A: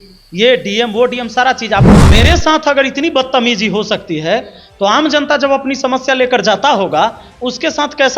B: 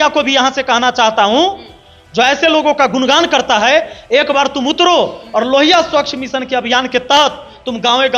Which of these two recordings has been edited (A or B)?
A